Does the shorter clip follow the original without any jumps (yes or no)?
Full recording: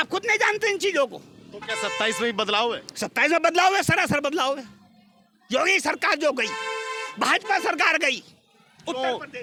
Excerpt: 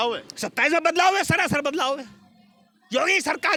yes